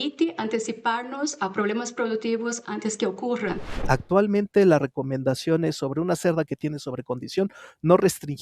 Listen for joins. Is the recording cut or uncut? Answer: cut